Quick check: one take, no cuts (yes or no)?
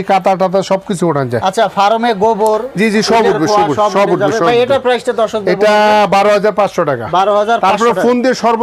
yes